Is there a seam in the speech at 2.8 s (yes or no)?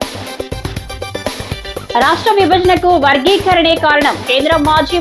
no